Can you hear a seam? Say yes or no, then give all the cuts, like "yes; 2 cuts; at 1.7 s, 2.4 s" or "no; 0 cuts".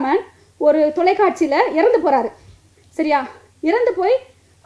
no; 0 cuts